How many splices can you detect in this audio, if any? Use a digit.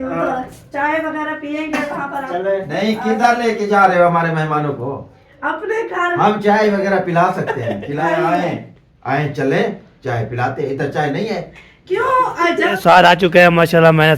3